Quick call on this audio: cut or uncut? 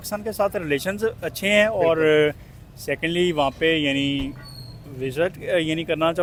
uncut